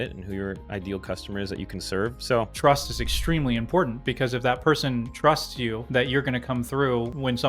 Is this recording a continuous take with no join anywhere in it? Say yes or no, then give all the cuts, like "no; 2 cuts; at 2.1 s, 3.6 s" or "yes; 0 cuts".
no; 1 cut; at 2.5 s